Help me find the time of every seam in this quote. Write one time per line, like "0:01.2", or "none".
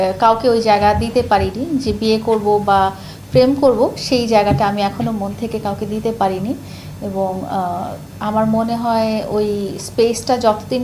none